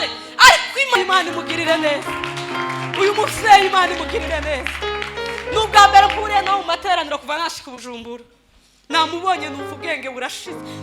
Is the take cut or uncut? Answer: cut